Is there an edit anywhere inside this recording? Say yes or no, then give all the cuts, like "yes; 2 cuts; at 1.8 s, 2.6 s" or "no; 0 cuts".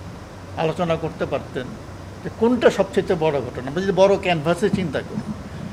no; 0 cuts